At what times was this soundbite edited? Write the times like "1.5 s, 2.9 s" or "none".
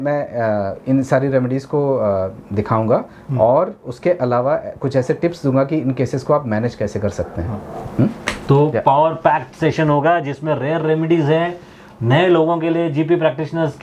none

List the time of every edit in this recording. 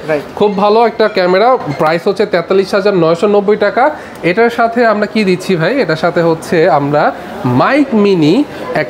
none

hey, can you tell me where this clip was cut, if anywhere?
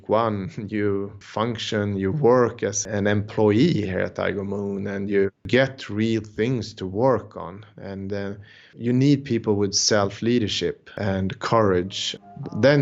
1.2 s, 2.8 s, 5.5 s

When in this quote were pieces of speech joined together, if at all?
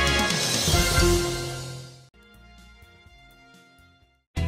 1.5 s

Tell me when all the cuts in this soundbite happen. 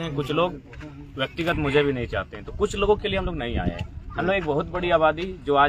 none

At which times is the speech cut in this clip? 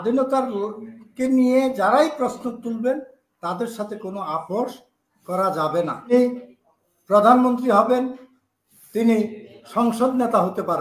6.1 s

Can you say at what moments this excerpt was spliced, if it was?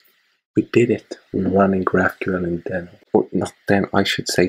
2.9 s

